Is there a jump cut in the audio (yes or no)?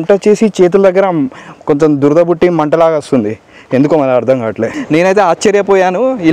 yes